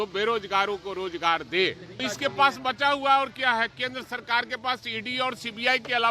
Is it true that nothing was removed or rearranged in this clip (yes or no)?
no